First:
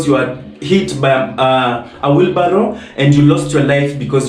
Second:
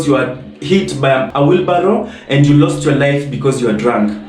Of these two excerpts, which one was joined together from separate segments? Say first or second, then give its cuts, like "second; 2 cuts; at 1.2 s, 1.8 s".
second; 1 cut; at 1.3 s